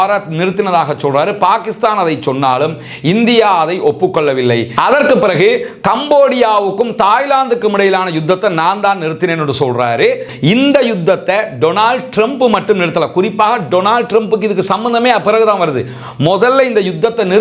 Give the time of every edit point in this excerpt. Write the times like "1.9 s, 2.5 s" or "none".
4.7 s, 10.3 s